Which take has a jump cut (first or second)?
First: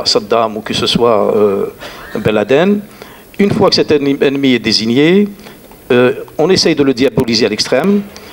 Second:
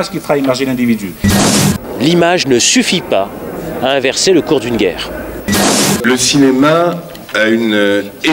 second